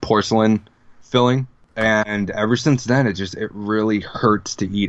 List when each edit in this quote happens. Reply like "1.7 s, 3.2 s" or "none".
1.6 s

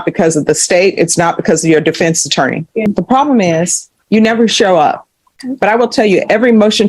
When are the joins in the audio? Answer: 2.9 s, 5.4 s

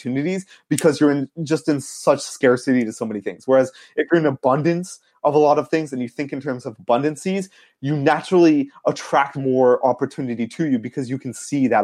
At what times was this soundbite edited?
none

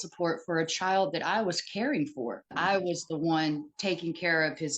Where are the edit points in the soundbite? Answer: 2.5 s

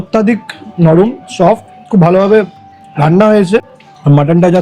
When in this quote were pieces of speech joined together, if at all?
3.7 s

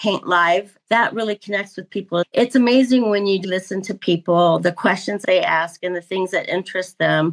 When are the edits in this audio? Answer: 0.8 s, 2.3 s, 3.4 s, 5.2 s

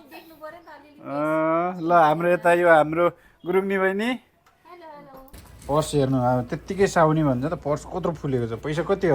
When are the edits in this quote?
5.4 s

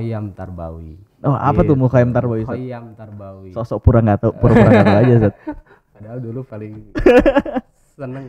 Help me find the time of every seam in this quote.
none

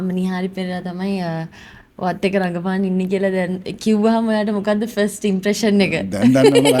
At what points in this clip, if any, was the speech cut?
none

